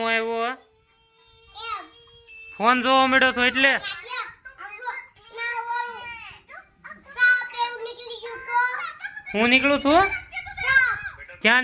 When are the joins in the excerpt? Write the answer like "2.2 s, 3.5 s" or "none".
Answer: none

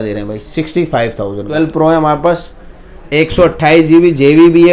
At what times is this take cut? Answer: 1.5 s

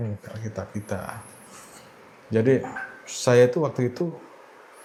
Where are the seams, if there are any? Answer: none

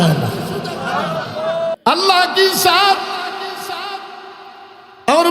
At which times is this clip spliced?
1.8 s

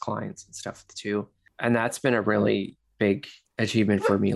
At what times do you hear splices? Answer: 1.4 s

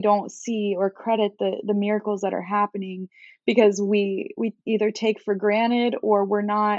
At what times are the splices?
none

